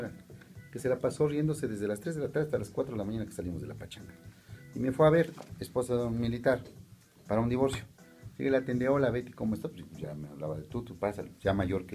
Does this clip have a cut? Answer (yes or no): yes